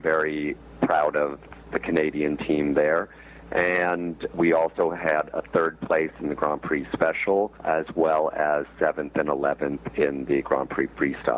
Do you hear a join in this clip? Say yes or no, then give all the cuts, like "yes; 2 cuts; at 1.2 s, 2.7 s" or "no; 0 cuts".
yes; 3 cuts; at 1.5 s, 4.3 s, 7.6 s